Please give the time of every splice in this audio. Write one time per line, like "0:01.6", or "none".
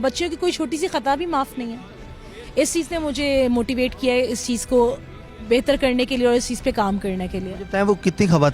none